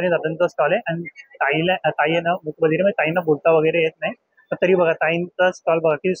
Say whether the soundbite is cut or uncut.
uncut